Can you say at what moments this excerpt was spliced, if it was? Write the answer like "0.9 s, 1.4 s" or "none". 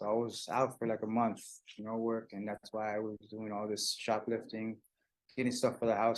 none